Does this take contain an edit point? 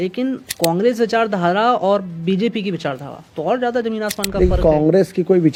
no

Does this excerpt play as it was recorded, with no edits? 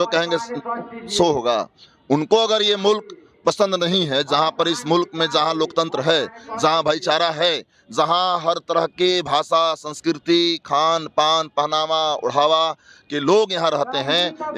yes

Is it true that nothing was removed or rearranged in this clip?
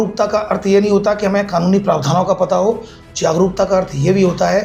yes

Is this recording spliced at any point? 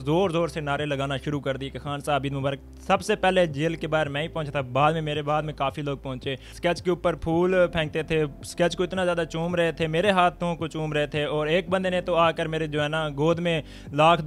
yes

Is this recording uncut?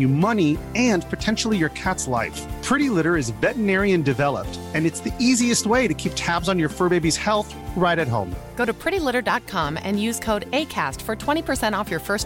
yes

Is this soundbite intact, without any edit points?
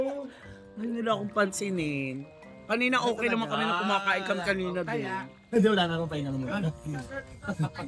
yes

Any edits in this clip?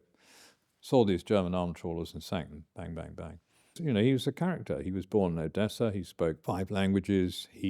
yes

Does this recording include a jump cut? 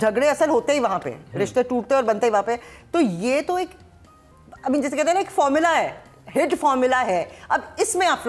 no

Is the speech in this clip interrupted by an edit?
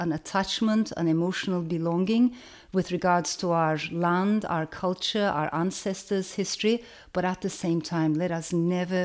no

